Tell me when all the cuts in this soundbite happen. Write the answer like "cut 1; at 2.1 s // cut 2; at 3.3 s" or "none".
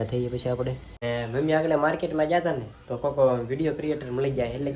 cut 1; at 1.0 s